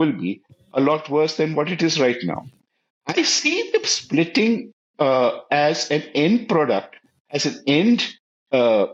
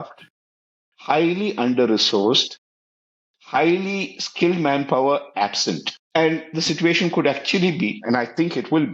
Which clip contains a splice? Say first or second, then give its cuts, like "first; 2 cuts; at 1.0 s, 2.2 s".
second; 1 cut; at 5.9 s